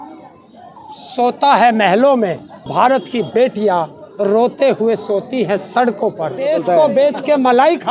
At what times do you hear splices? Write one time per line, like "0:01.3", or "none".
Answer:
0:02.7
0:06.5